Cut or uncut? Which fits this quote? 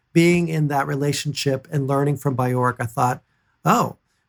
uncut